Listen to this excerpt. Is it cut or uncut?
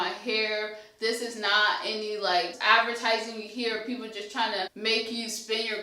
cut